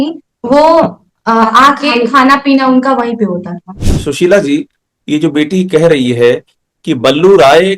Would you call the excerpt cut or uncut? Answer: cut